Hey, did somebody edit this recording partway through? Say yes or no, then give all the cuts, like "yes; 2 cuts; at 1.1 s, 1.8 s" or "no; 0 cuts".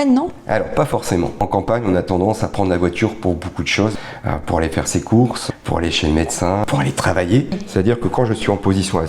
yes; 5 cuts; at 1.4 s, 3.9 s, 5.4 s, 6.6 s, 7.6 s